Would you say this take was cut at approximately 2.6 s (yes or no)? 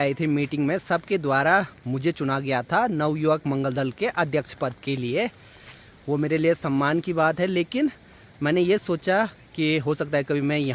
no